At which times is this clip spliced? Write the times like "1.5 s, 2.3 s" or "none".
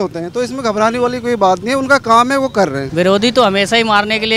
2.8 s